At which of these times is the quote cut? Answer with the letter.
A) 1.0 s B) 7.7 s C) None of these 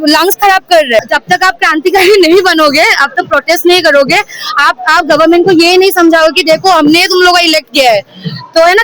A